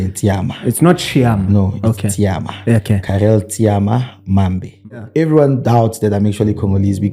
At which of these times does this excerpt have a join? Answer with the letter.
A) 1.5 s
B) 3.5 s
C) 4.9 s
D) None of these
C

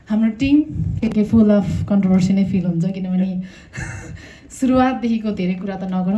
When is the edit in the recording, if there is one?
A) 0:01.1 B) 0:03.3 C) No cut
A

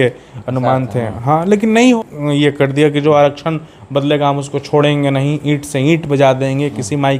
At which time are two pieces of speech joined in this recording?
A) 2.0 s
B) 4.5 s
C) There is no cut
A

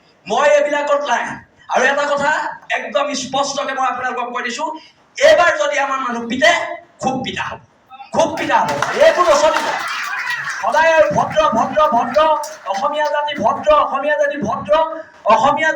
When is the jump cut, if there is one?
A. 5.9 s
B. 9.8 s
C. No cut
C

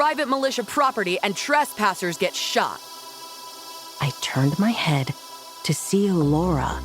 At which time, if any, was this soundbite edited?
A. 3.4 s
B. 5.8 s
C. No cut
A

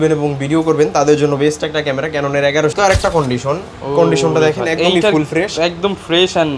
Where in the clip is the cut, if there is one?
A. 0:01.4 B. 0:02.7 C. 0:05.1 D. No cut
B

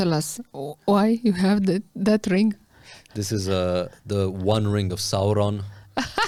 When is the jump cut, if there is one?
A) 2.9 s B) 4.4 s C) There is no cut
C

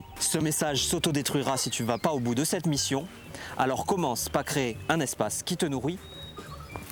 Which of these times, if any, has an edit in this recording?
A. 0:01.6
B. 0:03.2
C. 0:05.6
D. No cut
D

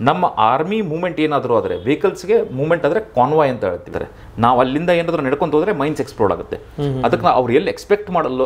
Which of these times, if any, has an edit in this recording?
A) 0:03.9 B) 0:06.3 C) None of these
A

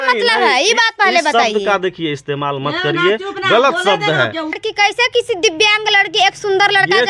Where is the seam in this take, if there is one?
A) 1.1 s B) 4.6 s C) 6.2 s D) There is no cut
B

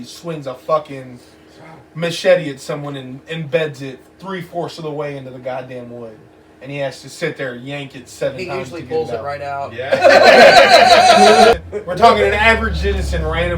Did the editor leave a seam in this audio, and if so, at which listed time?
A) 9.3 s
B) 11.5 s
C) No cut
B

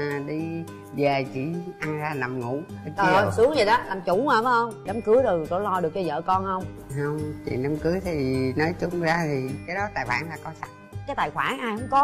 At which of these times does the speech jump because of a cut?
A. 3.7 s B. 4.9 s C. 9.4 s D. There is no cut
B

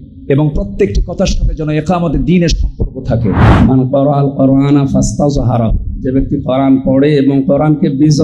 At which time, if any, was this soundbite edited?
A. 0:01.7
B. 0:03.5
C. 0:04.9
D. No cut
B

